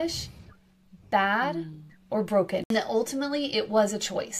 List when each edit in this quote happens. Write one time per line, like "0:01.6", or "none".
0:02.7